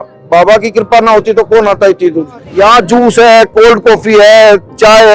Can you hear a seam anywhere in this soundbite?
yes; 1 cut; at 2.5 s

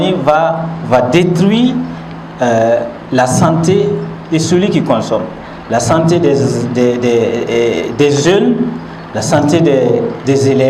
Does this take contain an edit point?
no; 0 cuts

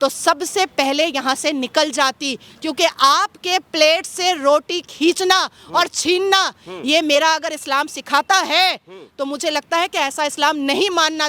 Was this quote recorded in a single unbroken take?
yes; 0 cuts

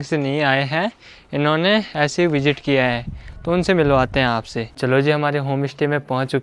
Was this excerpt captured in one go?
yes; 0 cuts

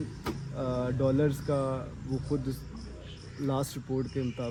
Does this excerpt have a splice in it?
no; 0 cuts

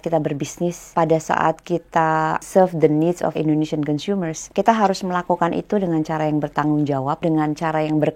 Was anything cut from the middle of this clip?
yes; 5 cuts; at 0.8 s, 2.4 s, 3.3 s, 4.4 s, 7.2 s

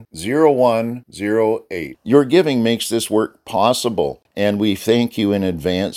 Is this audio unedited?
no; 1 cut; at 4.2 s

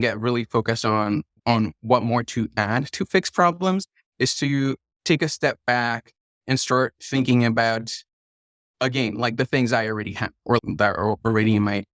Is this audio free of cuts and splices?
no; 1 cut; at 10.6 s

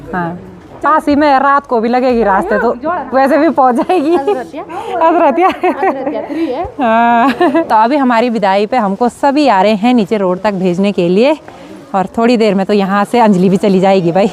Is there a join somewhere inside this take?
no; 0 cuts

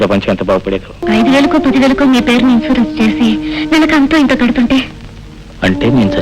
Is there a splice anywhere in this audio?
yes; 1 cut; at 1.0 s

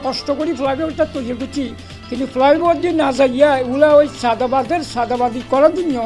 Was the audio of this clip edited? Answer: no; 0 cuts

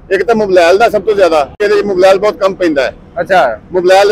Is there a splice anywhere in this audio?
yes; 1 cut; at 1.6 s

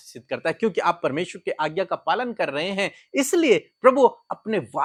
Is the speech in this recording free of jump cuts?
yes; 0 cuts

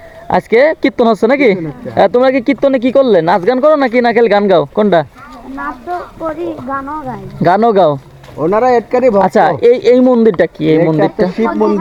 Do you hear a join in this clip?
no; 0 cuts

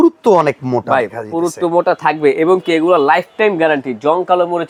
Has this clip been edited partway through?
no; 0 cuts

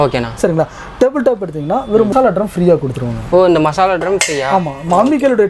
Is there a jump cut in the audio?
yes; 1 cut; at 2.1 s

